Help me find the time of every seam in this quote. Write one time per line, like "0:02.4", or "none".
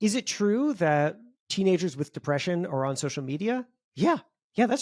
none